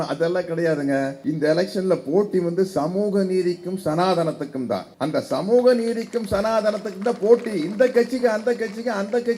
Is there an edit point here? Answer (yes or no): yes